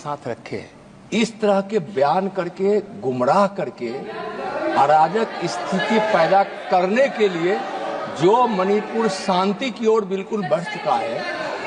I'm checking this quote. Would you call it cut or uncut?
uncut